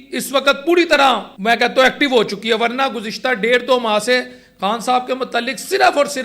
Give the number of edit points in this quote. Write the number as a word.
one